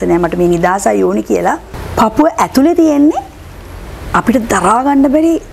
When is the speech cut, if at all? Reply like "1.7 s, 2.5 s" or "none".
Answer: 1.8 s

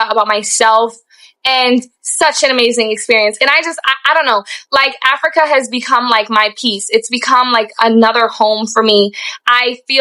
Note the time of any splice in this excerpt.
1.9 s

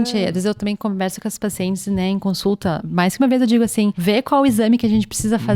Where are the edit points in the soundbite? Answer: 2.8 s, 4.0 s

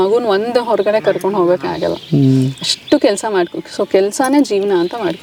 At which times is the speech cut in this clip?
none

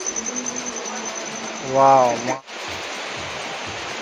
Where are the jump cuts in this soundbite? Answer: 2.3 s

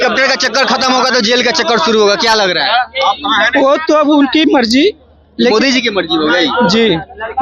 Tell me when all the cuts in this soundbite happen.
none

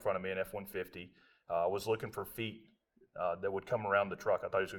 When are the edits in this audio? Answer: none

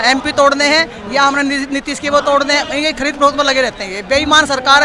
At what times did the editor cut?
none

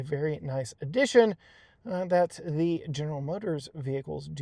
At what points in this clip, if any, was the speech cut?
none

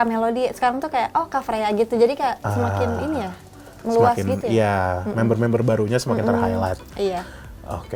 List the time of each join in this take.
none

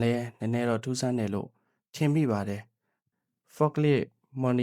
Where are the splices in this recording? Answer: 3.0 s

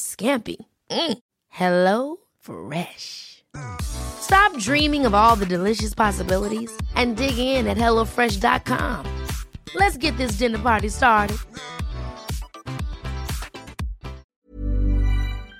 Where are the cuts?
14.4 s

